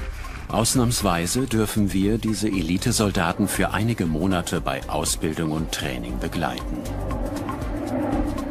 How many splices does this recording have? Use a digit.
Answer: 1